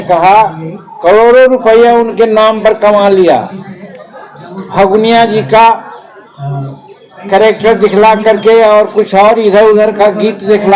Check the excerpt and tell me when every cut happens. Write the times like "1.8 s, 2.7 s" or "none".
none